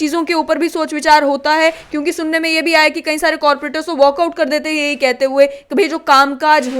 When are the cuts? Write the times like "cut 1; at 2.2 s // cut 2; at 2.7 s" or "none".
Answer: none